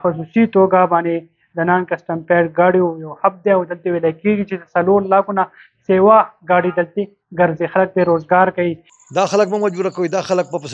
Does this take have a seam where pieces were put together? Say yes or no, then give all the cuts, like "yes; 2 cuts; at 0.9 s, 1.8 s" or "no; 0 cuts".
yes; 1 cut; at 8.9 s